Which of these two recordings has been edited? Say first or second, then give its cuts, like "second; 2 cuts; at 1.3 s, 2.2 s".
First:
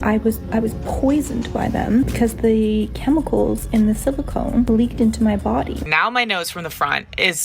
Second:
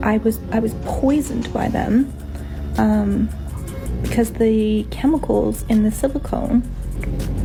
first; 3 cuts; at 2.1 s, 4.7 s, 5.9 s